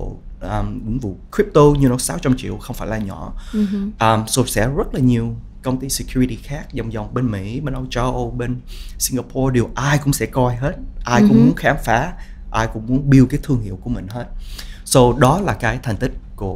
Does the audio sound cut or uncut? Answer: uncut